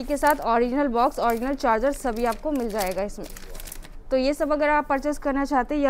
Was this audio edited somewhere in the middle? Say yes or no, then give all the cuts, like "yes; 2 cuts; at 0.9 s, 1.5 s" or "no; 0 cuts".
no; 0 cuts